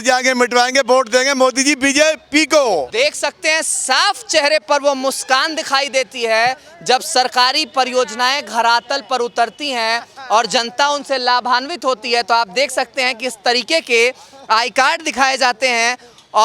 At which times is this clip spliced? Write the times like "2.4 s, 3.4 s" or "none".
none